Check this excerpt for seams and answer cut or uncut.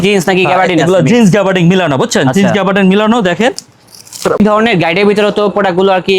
cut